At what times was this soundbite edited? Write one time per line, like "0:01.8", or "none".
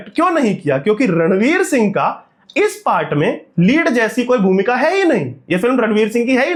none